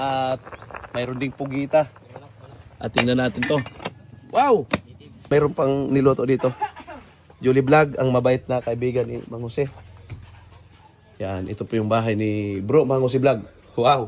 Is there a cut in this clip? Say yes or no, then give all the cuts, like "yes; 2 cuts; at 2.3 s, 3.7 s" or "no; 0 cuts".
yes; 1 cut; at 5.3 s